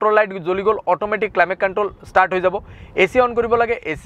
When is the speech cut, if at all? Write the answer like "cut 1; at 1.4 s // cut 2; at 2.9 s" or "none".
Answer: none